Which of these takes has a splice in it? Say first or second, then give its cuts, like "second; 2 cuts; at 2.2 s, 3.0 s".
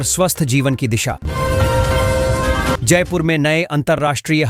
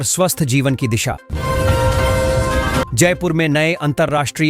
second; 2 cuts; at 1.3 s, 2.9 s